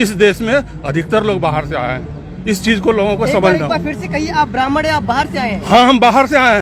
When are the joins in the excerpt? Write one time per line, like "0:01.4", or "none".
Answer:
none